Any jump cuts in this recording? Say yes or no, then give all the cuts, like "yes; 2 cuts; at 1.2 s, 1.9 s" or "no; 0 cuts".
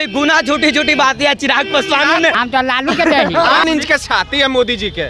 yes; 2 cuts; at 2.3 s, 3.6 s